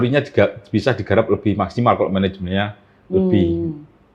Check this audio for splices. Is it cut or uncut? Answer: uncut